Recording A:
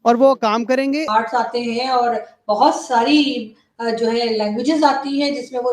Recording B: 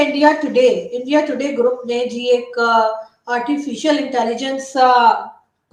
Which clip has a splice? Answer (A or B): A